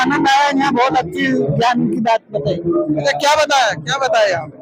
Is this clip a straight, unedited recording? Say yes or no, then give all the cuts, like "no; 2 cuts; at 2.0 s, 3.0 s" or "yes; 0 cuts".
yes; 0 cuts